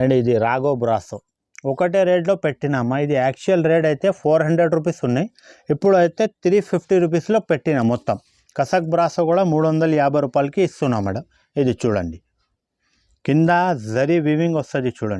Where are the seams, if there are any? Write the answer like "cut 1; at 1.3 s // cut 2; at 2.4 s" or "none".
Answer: none